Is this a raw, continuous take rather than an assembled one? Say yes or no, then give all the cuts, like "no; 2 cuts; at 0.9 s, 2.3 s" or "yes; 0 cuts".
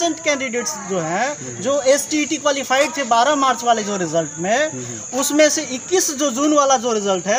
yes; 0 cuts